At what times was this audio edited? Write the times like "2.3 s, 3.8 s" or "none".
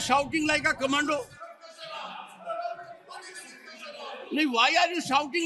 none